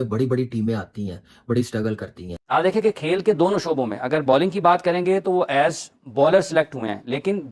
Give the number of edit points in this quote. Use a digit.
1